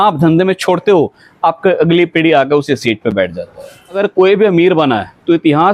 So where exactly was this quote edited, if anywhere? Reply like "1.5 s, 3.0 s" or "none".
4.0 s